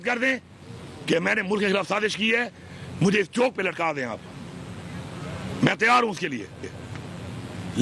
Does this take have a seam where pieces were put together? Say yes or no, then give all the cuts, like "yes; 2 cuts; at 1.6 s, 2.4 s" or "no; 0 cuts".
no; 0 cuts